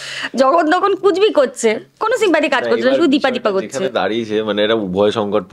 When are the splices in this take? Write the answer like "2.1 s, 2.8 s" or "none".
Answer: none